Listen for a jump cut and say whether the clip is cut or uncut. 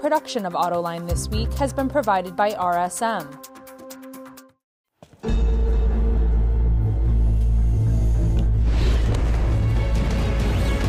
cut